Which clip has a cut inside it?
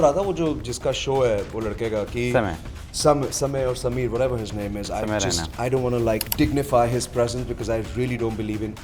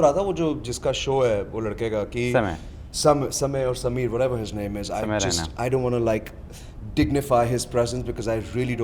first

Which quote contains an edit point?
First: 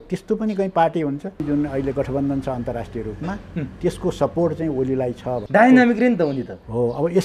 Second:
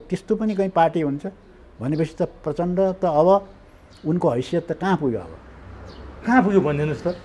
first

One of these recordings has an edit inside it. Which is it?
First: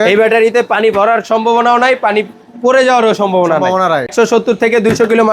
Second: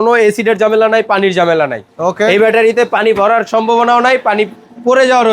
first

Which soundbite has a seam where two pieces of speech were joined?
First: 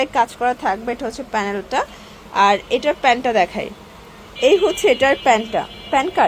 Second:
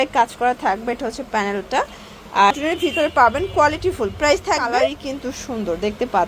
second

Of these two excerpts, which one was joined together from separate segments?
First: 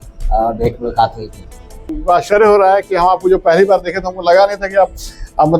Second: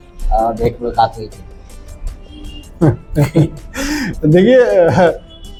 first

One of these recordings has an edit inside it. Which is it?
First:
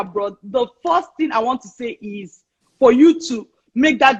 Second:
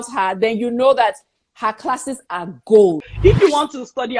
second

